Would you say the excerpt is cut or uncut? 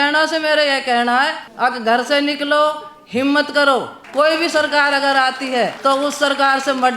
cut